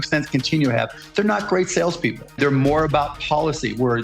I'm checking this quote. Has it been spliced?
yes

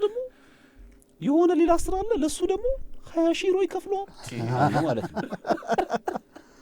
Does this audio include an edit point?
no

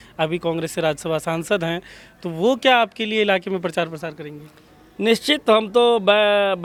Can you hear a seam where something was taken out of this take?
no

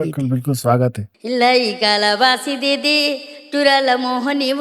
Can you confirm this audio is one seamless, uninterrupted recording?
no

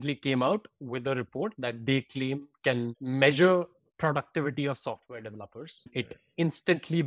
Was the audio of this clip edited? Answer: yes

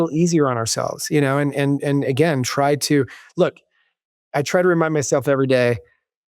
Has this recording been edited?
no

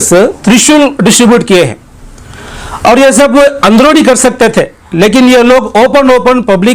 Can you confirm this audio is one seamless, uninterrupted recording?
yes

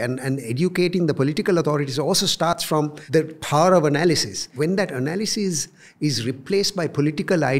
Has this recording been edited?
yes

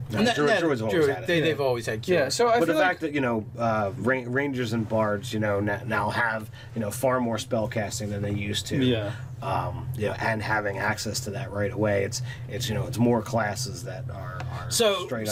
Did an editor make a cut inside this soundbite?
no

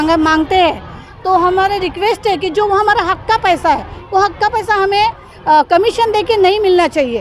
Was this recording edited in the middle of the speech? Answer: no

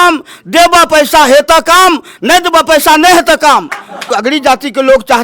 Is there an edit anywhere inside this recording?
yes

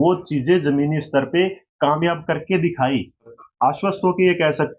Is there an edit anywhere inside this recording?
yes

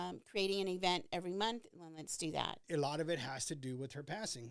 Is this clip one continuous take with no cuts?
no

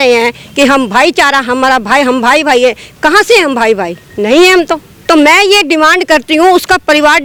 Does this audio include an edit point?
no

